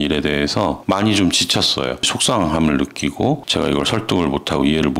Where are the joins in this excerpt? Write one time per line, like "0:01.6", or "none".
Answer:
none